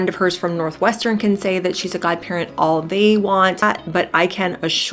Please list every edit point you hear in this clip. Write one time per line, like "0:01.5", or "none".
0:03.6